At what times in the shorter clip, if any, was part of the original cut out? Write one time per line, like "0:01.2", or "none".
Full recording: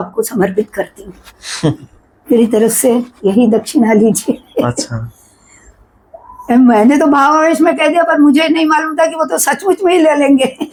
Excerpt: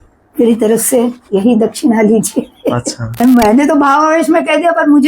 0:03.0